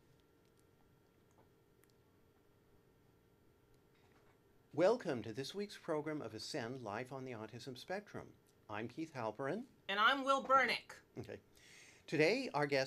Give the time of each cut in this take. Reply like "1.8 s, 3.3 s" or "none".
4.2 s